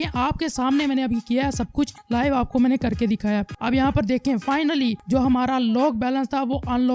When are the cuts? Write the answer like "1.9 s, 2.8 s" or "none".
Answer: 3.5 s